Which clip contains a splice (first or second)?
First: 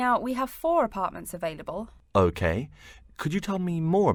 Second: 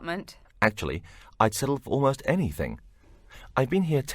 second